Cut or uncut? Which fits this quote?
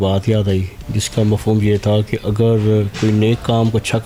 uncut